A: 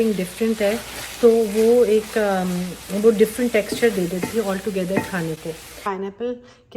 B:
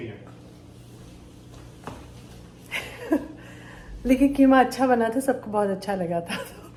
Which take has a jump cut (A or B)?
A